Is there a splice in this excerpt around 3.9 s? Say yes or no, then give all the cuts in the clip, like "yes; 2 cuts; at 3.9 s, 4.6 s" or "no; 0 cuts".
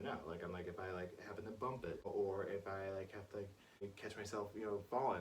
yes; 2 cuts; at 2.0 s, 3.9 s